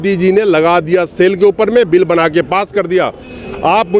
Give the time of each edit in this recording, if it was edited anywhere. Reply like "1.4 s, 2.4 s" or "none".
none